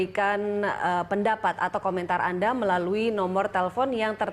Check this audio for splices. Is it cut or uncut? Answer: uncut